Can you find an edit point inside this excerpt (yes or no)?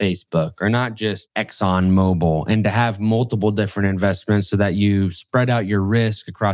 yes